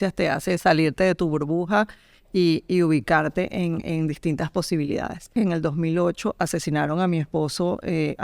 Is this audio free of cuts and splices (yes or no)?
no